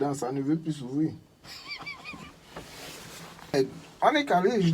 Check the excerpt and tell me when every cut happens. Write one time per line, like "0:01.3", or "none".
0:03.5